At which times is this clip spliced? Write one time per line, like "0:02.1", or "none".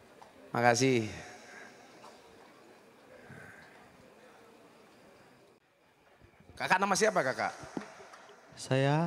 0:05.6

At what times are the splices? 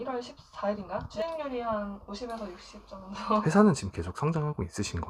0:03.4

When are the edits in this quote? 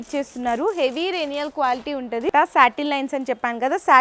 0:02.3

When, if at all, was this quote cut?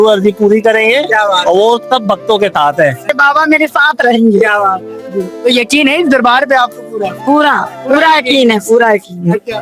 0:03.0

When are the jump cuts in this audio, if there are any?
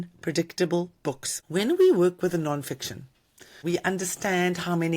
0:01.3
0:03.5

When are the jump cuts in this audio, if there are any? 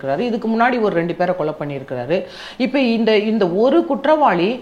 none

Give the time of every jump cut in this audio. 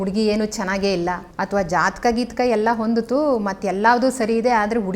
0:01.3

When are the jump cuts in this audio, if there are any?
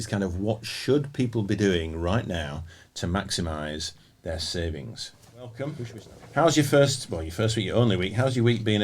0:05.8

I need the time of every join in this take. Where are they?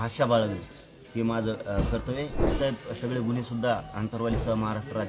0:02.5

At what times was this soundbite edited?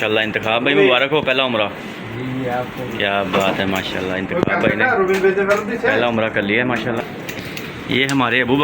0:07.0

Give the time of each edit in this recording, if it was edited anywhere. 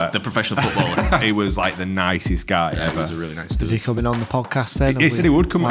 0:01.2

